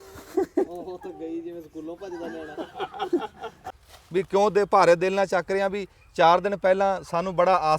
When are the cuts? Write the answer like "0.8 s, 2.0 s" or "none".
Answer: 3.6 s